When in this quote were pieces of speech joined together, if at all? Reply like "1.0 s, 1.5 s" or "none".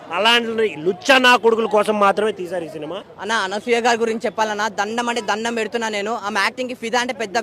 2.9 s